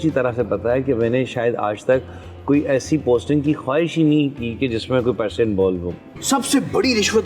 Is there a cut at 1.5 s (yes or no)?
no